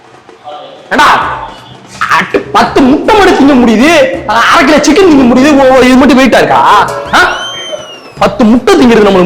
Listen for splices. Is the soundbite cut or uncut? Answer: cut